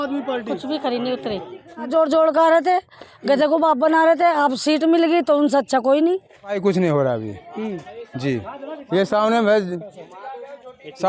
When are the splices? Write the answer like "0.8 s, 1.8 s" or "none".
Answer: 1.9 s, 6.6 s